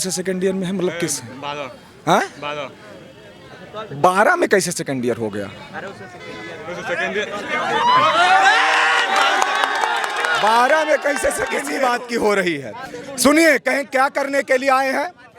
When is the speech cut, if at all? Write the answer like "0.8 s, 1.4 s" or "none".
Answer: 11.6 s